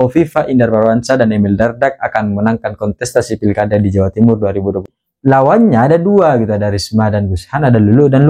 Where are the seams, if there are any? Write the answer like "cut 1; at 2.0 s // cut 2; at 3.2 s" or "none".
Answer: cut 1; at 5.0 s